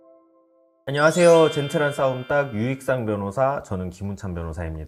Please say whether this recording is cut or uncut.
uncut